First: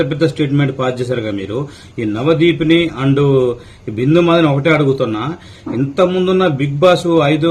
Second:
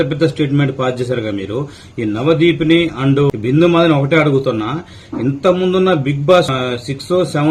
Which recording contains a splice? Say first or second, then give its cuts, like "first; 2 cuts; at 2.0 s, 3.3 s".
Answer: second; 2 cuts; at 3.3 s, 6.5 s